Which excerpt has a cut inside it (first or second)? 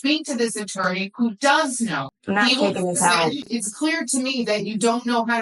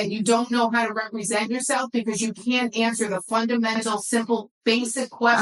first